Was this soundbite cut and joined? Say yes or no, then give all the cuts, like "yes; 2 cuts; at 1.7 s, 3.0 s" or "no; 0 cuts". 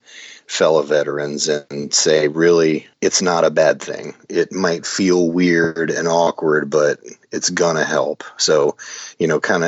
yes; 1 cut; at 2.9 s